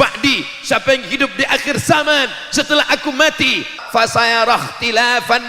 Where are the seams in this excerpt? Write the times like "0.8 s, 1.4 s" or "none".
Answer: 3.8 s